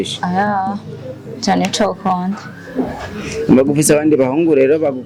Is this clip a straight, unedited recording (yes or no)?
yes